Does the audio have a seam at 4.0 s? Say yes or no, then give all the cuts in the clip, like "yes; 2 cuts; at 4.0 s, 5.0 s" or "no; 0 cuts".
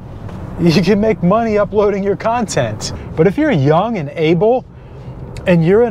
no; 1 cut; at 2.8 s